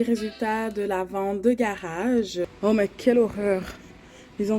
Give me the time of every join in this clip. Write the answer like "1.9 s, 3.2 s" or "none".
2.5 s